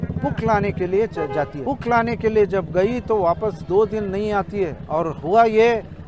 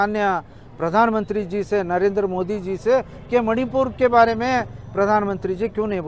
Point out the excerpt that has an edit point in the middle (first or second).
first